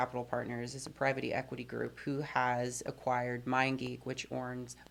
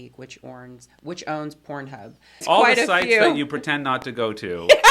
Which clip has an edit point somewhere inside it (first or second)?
second